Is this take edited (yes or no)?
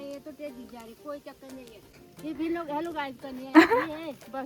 yes